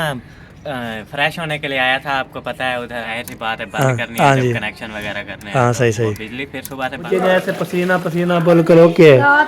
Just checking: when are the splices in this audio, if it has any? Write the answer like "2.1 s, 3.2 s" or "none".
3.1 s, 7.0 s